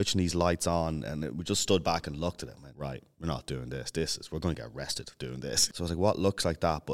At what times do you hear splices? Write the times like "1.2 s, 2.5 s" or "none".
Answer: 2.6 s, 5.5 s